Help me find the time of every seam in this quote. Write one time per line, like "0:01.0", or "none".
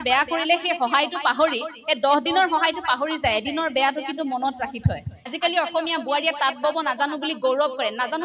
0:05.3